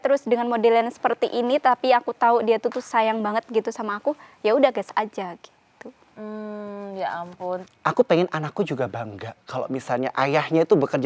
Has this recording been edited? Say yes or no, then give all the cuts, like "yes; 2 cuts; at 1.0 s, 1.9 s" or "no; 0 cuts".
yes; 1 cut; at 7.6 s